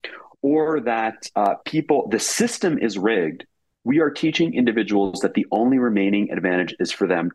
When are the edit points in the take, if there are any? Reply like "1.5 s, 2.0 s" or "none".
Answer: none